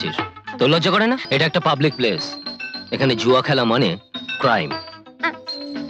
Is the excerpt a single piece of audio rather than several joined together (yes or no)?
no